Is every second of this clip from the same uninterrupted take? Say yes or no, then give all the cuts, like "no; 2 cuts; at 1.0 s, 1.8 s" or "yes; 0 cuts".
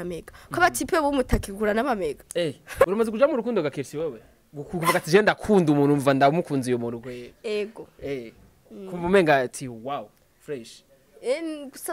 no; 1 cut; at 2.9 s